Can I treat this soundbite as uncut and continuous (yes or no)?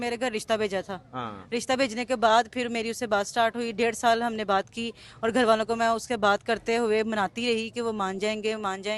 yes